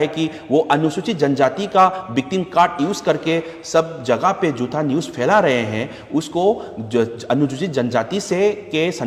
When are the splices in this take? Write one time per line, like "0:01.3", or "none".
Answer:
none